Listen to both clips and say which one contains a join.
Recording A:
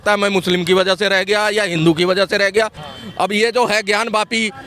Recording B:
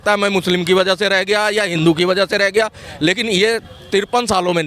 A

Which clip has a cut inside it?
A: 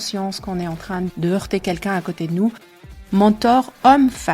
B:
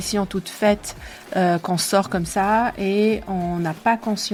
A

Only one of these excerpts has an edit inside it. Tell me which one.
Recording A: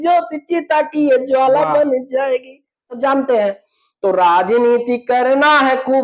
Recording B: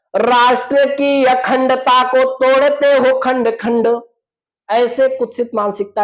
A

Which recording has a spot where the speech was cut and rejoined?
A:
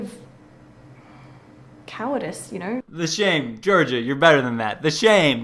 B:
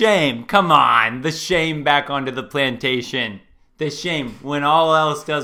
A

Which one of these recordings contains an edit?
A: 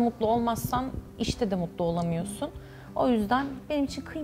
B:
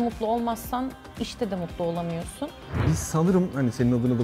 B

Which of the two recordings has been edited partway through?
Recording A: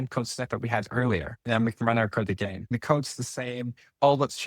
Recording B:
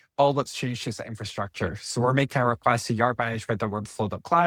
A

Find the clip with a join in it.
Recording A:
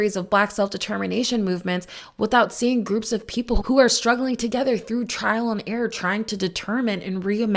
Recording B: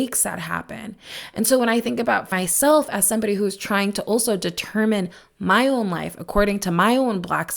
B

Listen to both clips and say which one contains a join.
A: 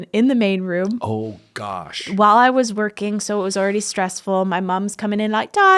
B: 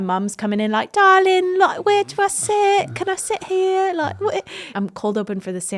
B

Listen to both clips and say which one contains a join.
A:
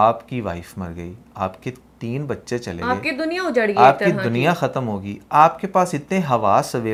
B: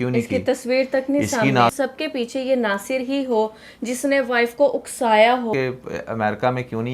B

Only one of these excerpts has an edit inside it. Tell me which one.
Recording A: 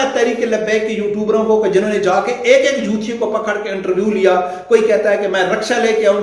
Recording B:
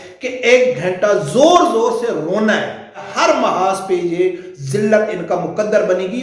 B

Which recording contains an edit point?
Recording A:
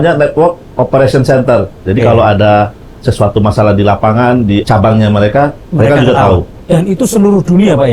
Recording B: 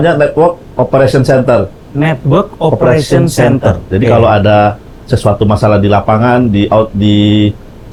A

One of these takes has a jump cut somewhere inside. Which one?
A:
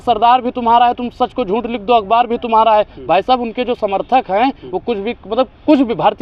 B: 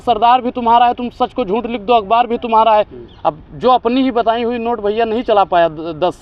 B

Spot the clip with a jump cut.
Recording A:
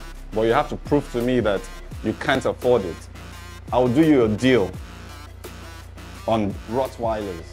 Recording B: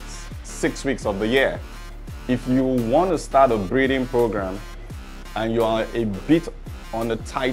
A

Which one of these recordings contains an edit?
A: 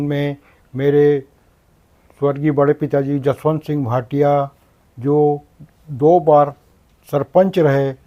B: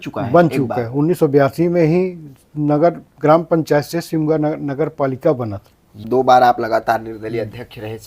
B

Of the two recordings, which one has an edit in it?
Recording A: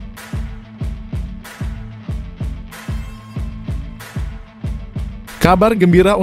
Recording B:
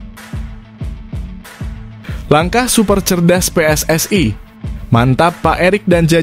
B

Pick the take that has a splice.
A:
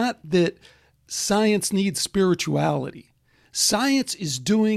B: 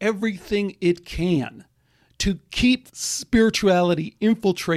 B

